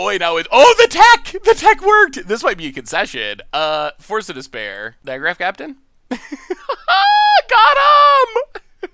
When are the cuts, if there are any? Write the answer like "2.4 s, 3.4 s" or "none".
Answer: 4.9 s